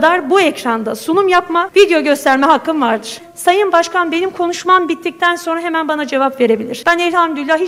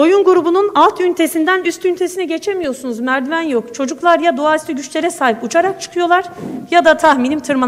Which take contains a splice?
first; 3 cuts; at 1.7 s, 3.2 s, 6.7 s

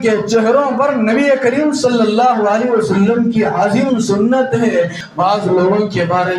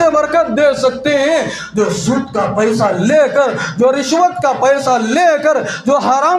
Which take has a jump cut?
first; 1 cut; at 5.0 s

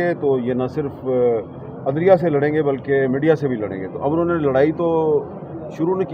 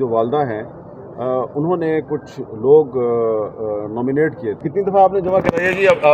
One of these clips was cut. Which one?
second; 1 cut; at 4.6 s

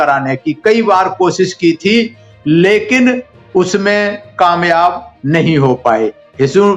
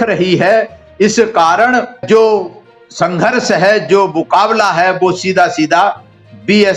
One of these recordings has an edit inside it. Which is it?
second; 1 cut; at 2.0 s

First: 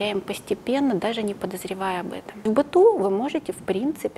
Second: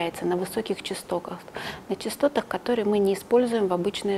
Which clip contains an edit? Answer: first; 1 cut; at 2.4 s

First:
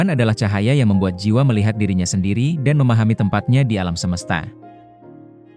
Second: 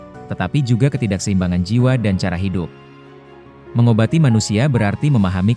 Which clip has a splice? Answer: first; 1 cut; at 4.5 s

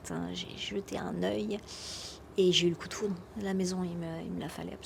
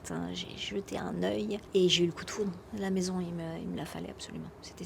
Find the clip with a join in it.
second; 1 cut; at 1.6 s

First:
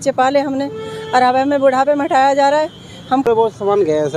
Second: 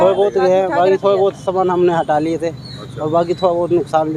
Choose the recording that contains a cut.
first; 1 cut; at 3.3 s

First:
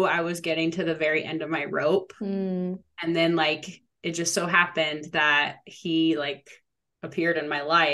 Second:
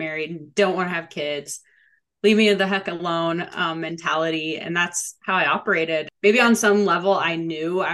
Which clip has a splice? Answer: second; 1 cut; at 6.1 s

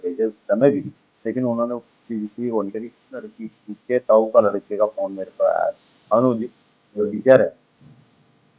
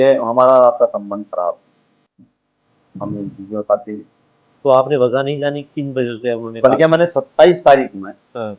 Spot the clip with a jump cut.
first; 1 cut; at 3.2 s

